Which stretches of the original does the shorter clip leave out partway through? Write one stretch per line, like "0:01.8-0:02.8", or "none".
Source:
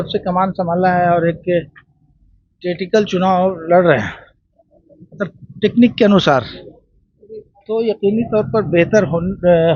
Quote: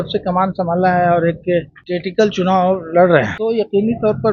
0:01.8-0:02.5
0:04.1-0:07.6